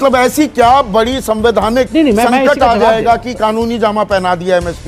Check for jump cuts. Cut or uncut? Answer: uncut